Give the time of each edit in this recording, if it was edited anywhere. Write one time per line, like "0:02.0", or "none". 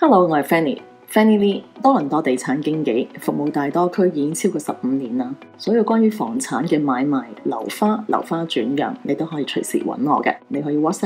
none